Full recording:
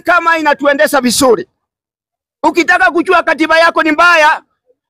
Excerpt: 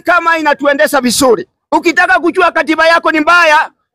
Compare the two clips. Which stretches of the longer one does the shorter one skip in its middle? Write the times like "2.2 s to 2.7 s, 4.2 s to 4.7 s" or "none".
1.5 s to 2.3 s